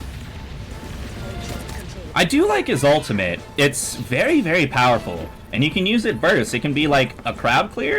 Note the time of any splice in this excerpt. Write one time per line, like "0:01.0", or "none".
0:02.0